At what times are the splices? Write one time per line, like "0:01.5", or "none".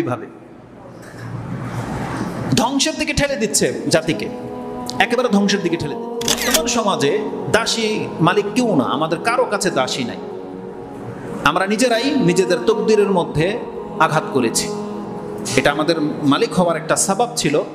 0:06.4